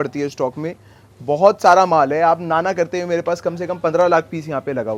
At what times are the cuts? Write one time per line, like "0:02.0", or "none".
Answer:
none